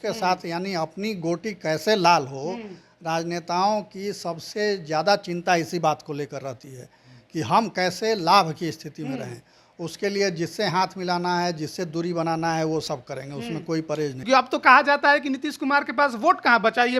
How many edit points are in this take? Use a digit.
1